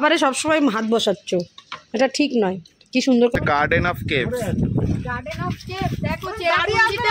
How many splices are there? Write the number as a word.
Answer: one